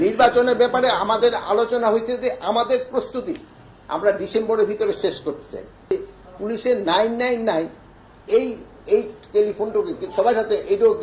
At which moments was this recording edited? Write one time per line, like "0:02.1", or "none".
0:05.9